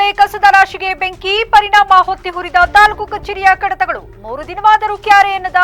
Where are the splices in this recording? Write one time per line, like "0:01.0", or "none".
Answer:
none